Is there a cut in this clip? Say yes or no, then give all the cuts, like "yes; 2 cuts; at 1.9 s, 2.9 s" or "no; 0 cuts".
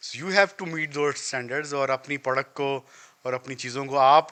no; 0 cuts